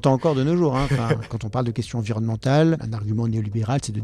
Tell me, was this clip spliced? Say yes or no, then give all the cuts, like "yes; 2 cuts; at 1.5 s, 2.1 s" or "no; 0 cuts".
yes; 2 cuts; at 1.4 s, 2.9 s